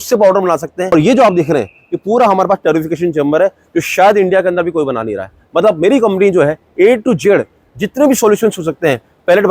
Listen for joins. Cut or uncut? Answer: cut